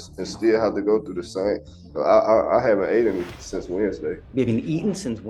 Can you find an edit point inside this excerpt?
yes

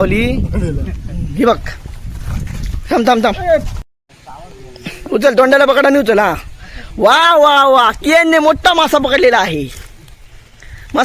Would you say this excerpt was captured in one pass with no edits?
no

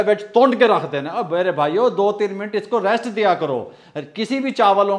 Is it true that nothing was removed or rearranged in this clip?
yes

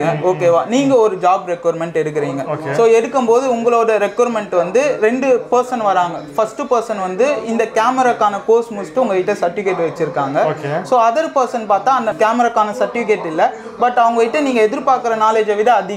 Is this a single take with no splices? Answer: no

